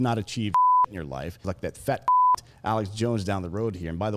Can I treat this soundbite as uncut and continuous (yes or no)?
no